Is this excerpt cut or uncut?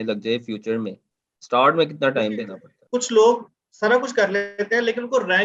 cut